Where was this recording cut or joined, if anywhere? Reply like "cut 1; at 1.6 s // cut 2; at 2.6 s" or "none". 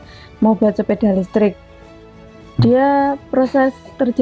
cut 1; at 2.0 s